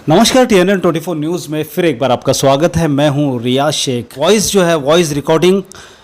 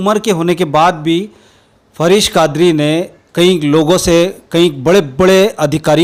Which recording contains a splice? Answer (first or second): first